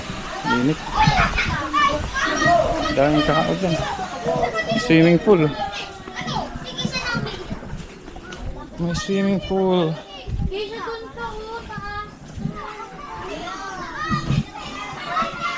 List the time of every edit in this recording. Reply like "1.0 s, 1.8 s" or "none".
none